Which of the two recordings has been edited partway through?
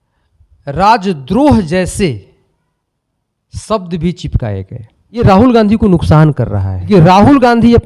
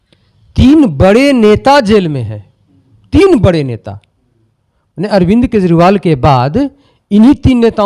first; 2 cuts; at 5.2 s, 6.9 s

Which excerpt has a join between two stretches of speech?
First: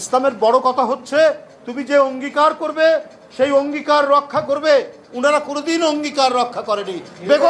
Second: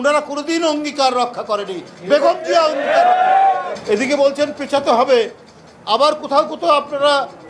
second; 1 cut; at 3.7 s

